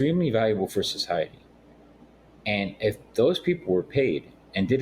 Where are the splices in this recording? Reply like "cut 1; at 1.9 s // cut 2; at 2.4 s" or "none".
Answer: none